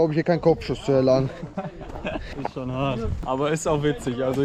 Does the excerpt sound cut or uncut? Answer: uncut